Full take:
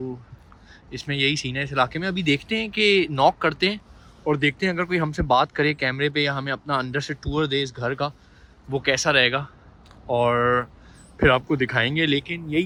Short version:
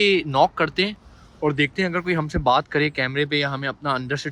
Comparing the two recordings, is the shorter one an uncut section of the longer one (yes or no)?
yes